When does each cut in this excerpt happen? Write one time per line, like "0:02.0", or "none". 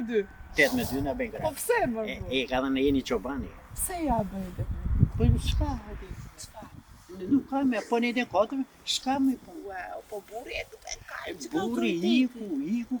none